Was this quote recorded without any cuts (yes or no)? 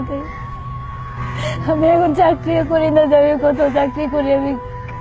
yes